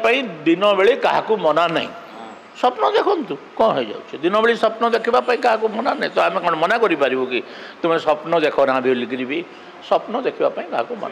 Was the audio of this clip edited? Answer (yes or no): no